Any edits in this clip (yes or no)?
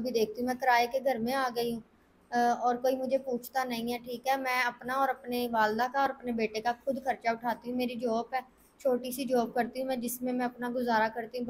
no